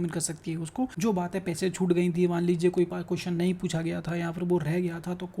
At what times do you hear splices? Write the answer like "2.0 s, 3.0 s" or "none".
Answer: 0.9 s